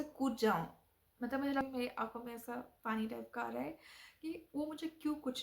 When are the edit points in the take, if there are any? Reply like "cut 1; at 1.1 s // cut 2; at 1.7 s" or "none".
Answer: cut 1; at 1.6 s